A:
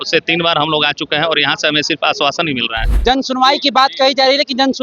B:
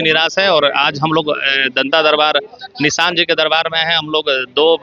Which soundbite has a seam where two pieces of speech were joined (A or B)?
A